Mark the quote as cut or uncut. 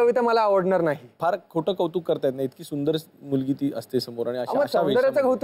cut